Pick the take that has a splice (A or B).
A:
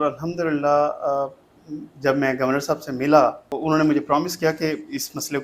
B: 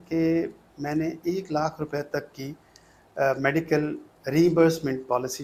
A